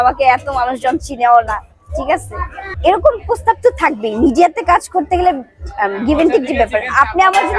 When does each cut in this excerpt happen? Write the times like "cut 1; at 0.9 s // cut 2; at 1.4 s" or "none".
none

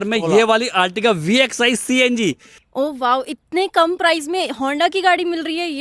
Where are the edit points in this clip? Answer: cut 1; at 2.6 s

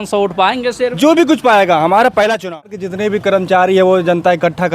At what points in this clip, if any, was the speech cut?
cut 1; at 2.9 s

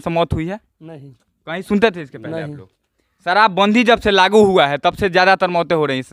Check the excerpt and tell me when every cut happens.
none

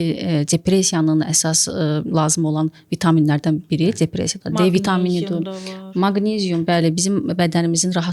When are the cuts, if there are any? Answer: none

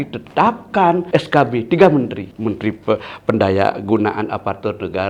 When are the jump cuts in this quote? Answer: cut 1; at 1.0 s // cut 2; at 2.2 s

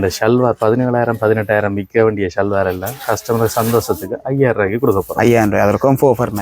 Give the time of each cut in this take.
none

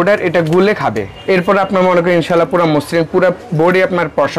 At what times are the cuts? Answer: cut 1; at 1.1 s

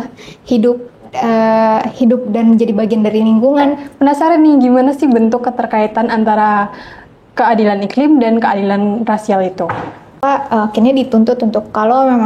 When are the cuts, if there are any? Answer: cut 1; at 3.9 s // cut 2; at 10.2 s

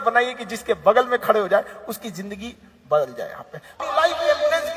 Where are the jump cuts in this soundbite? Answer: cut 1; at 3.8 s

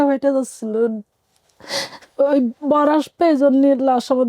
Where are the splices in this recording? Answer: cut 1; at 1.1 s

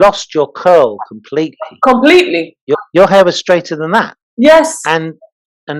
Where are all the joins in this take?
cut 1; at 2.7 s

